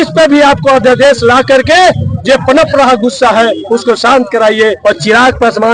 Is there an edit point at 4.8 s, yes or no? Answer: yes